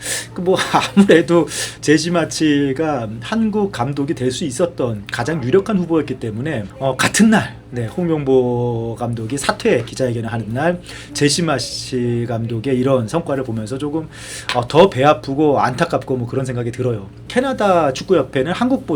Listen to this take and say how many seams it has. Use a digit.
1